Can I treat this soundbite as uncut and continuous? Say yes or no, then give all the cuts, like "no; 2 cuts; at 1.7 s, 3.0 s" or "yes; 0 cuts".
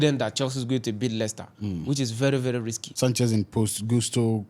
no; 1 cut; at 2.8 s